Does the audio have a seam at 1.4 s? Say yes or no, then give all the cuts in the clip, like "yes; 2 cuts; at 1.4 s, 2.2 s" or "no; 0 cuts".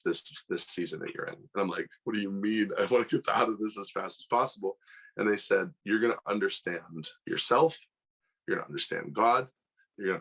no; 0 cuts